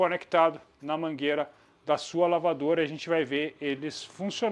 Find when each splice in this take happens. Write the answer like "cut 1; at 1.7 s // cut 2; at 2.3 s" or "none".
none

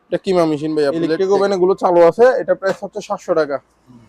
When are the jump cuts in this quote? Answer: cut 1; at 1.1 s

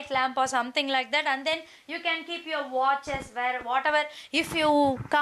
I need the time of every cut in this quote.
none

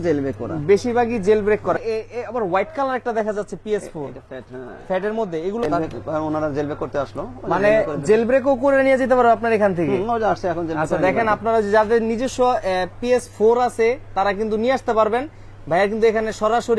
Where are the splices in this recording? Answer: cut 1; at 1.8 s // cut 2; at 5.6 s

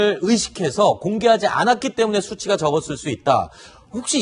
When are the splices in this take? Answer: cut 1; at 2.1 s

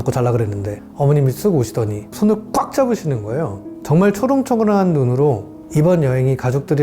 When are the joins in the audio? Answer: cut 1; at 2.0 s // cut 2; at 3.7 s // cut 3; at 5.5 s

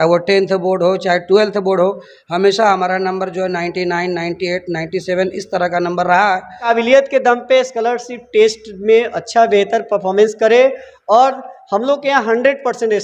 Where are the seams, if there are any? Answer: cut 1; at 6.7 s

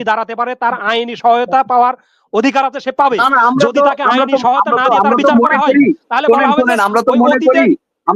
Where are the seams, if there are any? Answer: none

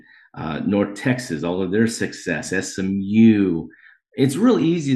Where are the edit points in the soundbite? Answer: none

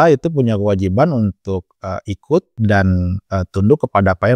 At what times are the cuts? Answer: cut 1; at 2.5 s

